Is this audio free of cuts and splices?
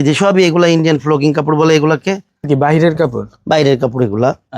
no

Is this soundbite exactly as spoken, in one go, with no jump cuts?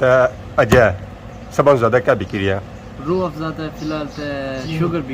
yes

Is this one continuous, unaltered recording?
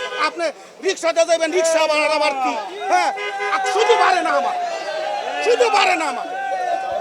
yes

